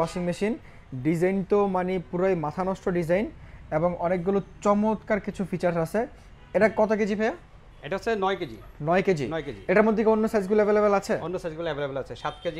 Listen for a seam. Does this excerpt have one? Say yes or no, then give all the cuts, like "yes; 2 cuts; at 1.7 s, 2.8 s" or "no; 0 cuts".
no; 0 cuts